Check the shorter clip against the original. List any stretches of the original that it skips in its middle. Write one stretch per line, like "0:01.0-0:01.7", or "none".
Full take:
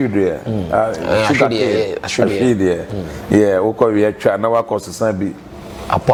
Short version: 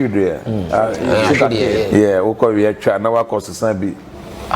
0:01.9-0:03.3